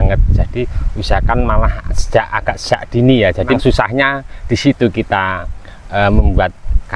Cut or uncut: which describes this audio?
cut